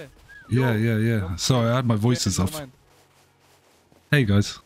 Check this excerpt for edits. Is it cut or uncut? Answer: uncut